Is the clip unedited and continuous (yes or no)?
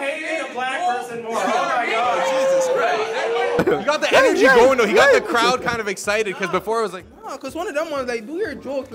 yes